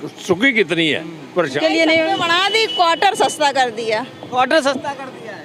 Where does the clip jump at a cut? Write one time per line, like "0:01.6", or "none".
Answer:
0:01.6